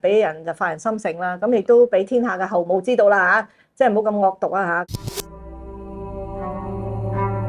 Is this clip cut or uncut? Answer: cut